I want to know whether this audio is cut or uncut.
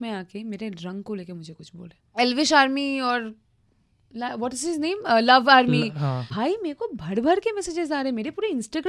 cut